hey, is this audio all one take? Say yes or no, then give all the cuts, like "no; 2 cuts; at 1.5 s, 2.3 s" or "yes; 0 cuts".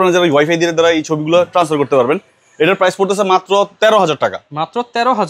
yes; 0 cuts